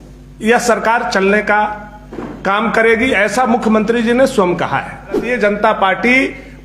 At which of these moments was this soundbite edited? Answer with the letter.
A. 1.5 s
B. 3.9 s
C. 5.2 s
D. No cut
C